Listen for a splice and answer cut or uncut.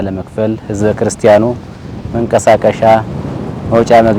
uncut